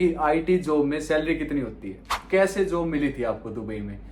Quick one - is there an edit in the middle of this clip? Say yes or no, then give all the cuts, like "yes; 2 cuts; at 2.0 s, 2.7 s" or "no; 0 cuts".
yes; 1 cut; at 2.2 s